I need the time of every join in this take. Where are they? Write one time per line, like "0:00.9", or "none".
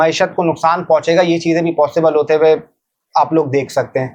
none